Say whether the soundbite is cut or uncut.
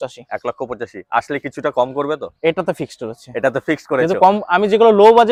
uncut